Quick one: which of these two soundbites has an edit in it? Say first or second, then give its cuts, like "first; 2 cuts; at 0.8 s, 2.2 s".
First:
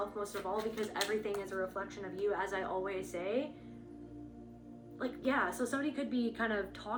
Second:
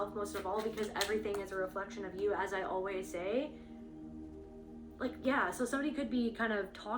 second; 2 cuts; at 3.5 s, 5.0 s